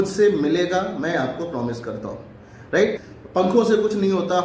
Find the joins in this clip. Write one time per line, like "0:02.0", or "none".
0:02.9